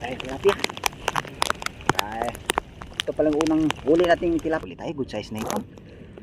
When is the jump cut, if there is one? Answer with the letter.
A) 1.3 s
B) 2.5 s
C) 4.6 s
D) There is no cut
C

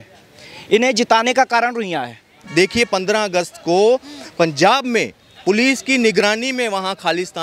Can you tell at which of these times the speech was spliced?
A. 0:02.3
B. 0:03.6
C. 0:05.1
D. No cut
A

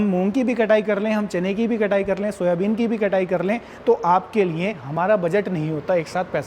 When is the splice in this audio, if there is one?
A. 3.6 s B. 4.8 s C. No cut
B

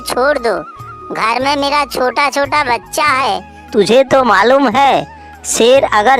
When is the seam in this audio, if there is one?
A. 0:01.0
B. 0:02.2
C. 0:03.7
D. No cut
C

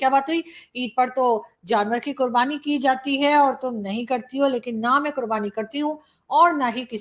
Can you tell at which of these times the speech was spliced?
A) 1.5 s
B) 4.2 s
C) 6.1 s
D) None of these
D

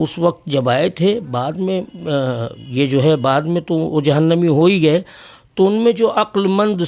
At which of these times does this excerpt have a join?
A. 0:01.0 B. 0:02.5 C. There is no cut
C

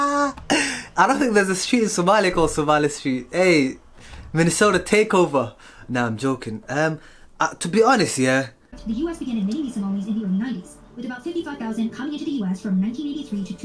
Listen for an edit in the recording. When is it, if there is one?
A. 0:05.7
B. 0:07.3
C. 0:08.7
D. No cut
C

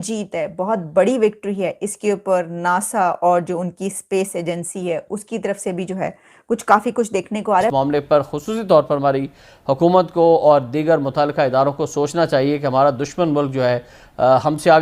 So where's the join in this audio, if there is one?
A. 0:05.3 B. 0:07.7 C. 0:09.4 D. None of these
B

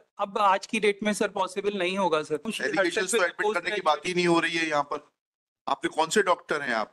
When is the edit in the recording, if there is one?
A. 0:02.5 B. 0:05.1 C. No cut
A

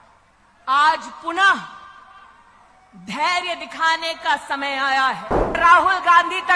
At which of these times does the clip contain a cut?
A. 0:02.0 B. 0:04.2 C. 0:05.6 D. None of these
C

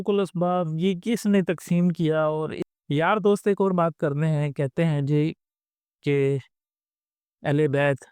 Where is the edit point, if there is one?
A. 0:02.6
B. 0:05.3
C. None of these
A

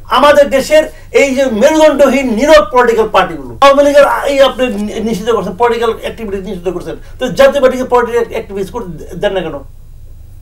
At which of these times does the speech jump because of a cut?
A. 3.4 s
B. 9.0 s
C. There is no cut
A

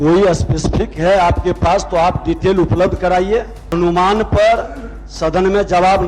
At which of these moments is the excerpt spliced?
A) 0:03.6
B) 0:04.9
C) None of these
A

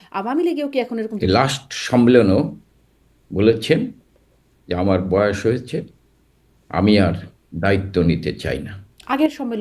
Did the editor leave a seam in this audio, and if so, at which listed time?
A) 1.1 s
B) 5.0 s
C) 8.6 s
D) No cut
A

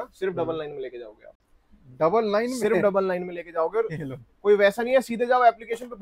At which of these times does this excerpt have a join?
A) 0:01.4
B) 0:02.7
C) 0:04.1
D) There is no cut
D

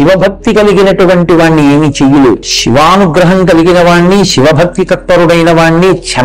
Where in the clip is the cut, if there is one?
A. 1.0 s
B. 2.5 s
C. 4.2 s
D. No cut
B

